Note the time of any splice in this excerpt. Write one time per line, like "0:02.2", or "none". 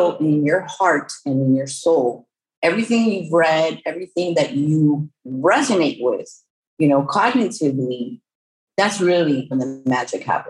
0:09.5